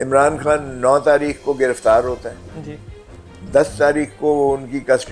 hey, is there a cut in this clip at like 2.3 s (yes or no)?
no